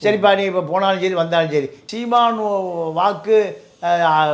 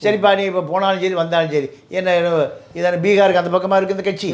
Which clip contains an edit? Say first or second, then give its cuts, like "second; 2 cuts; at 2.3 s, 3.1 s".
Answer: first; 1 cut; at 1.8 s